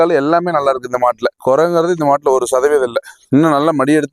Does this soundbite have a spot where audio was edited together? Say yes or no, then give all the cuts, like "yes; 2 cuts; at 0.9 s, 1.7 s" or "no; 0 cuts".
no; 0 cuts